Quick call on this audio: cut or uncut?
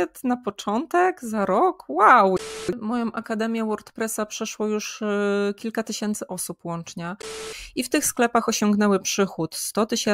cut